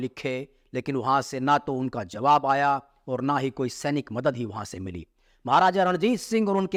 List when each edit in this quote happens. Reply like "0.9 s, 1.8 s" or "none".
none

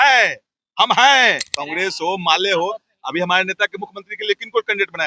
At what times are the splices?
1.5 s

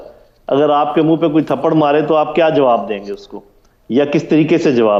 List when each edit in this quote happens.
none

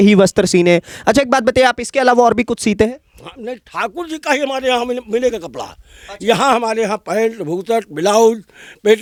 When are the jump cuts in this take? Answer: none

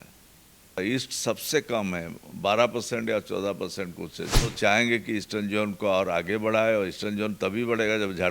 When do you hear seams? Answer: 0.8 s, 4.5 s

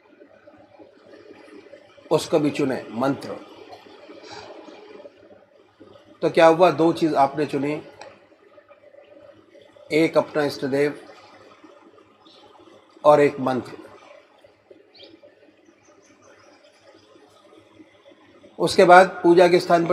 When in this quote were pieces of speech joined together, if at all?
17.7 s

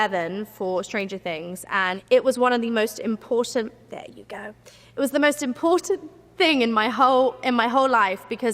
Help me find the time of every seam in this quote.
2.0 s

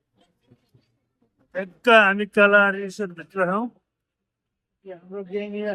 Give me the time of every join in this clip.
none

